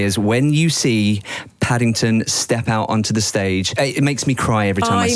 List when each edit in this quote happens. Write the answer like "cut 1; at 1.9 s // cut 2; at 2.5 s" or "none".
cut 1; at 3.7 s